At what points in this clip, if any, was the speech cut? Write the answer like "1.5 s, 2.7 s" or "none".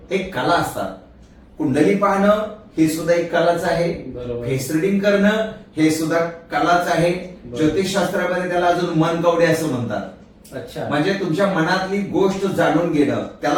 none